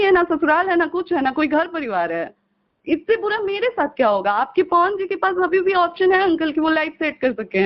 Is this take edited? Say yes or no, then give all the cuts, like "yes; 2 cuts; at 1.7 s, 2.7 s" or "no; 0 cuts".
no; 0 cuts